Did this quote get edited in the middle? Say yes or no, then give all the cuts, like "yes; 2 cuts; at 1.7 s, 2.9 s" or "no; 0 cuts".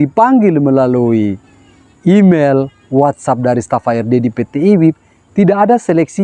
no; 0 cuts